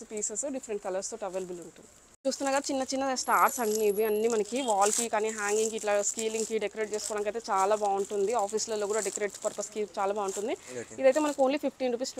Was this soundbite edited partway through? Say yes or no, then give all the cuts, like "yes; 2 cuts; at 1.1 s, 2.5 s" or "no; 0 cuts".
no; 0 cuts